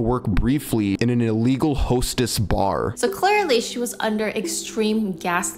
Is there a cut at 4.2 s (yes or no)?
no